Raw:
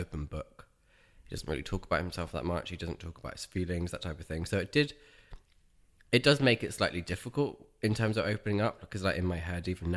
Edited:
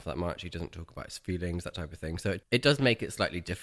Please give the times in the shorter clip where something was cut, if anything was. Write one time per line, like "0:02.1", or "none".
0:02.4